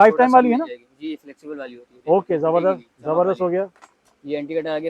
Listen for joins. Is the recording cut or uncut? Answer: uncut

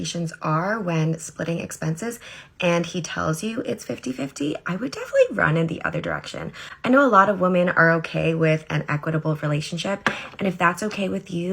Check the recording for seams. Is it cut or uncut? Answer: cut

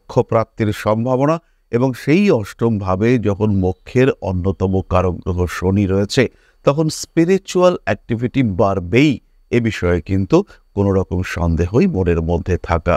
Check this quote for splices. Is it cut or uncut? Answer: uncut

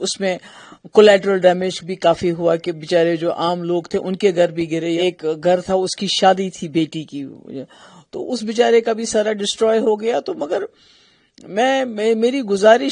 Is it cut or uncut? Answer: cut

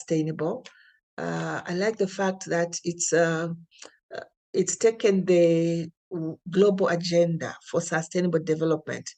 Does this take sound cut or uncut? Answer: uncut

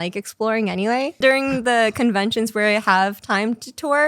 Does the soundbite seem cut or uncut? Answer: cut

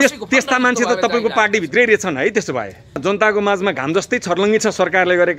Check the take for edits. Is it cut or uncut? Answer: cut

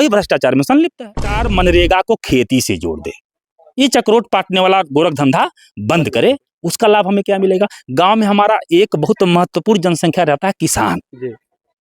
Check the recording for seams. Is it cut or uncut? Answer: cut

